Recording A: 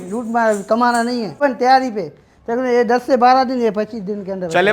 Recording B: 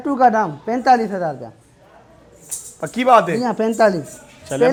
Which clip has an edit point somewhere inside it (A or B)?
A